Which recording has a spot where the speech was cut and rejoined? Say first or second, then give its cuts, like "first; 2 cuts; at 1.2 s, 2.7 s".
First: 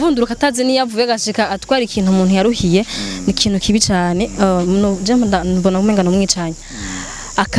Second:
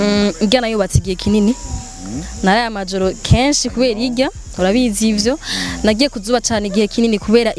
first; 1 cut; at 6.7 s